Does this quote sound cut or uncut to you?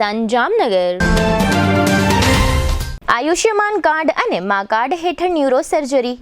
cut